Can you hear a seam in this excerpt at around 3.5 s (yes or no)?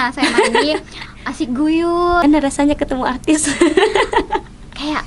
no